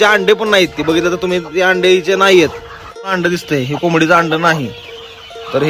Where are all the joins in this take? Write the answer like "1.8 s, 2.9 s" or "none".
3.1 s